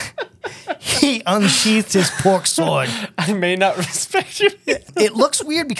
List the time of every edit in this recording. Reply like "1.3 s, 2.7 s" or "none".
4.9 s